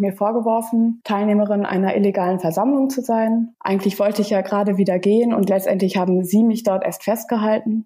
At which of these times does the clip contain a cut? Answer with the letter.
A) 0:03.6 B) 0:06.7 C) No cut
A